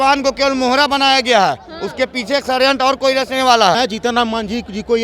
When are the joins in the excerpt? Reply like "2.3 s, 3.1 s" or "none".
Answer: 3.8 s